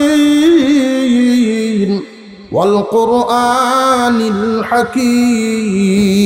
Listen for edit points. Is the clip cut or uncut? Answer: uncut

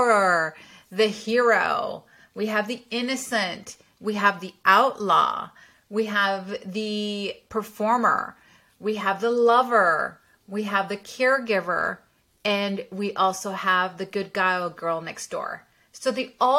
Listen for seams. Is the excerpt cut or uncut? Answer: uncut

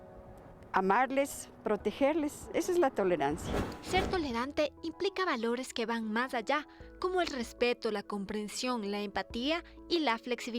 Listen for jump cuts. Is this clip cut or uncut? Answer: cut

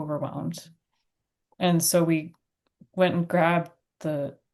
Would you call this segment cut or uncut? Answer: uncut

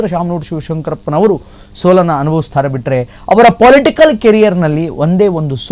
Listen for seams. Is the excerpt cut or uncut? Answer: uncut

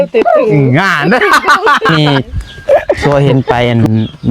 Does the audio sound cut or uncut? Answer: cut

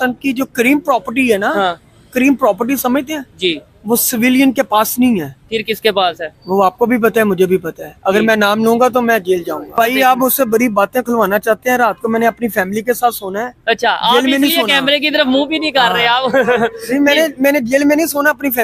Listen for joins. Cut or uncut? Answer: cut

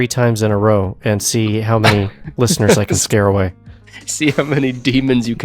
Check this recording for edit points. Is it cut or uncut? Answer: uncut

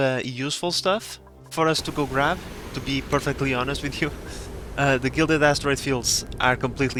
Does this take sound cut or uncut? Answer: uncut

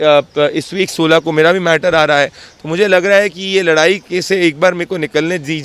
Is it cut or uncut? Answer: uncut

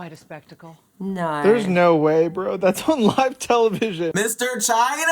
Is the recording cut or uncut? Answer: cut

